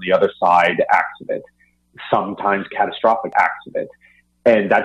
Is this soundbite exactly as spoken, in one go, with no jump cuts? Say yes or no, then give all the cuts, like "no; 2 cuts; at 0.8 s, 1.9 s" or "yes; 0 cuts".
yes; 0 cuts